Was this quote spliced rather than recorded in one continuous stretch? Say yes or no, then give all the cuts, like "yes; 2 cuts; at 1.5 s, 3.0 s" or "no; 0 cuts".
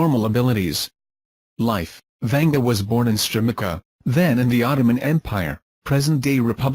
yes; 1 cut; at 4.8 s